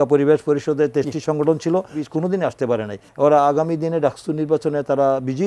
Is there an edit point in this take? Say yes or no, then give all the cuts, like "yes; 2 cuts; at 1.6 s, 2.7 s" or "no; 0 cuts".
yes; 2 cuts; at 2.0 s, 3.1 s